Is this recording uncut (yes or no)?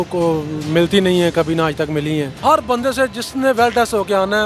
no